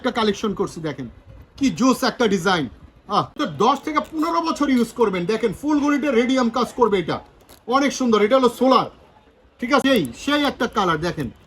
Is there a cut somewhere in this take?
yes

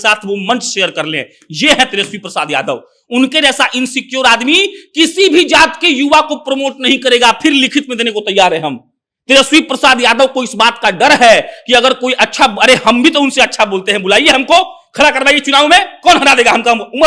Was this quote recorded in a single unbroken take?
yes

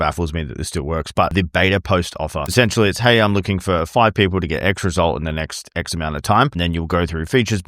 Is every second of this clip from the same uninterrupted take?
no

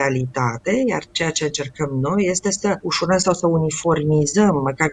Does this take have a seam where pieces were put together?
yes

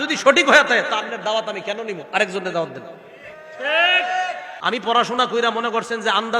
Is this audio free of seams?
no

